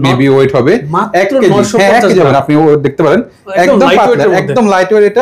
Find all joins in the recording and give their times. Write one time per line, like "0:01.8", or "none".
none